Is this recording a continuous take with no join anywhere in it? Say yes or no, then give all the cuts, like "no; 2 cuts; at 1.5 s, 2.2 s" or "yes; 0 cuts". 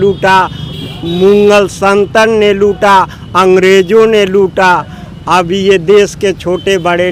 yes; 0 cuts